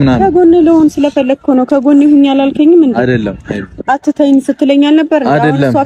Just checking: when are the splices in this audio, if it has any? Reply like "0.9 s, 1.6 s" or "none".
none